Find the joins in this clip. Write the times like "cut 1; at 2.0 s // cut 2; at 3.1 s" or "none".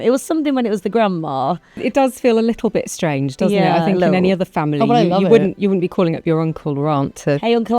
cut 1; at 1.8 s

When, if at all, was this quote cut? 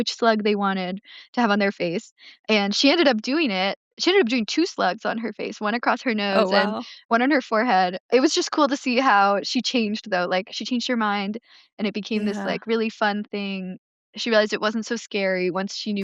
cut 1; at 4.0 s

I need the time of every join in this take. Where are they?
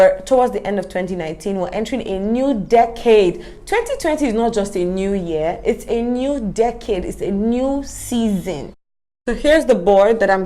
cut 1; at 8.7 s

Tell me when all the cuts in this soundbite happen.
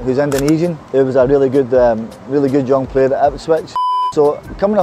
cut 1; at 3.9 s

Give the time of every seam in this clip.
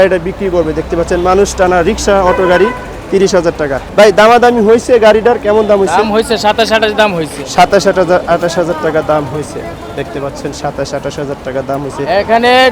cut 1; at 3.8 s

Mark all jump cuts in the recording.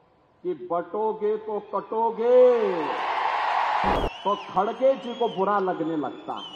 cut 1; at 4.0 s

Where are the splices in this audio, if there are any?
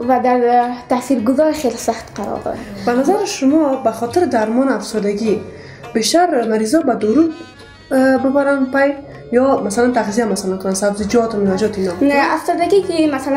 cut 1; at 2.7 s // cut 2; at 11.9 s

